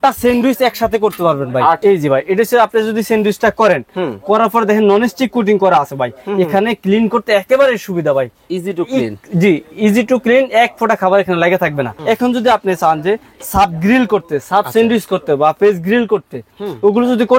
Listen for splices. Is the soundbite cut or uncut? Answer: cut